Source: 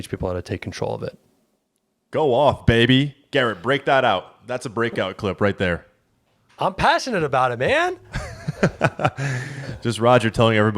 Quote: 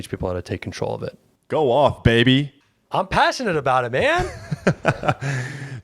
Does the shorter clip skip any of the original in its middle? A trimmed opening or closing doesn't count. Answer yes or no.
yes